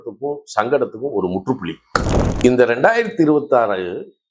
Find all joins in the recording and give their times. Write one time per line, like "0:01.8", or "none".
0:02.2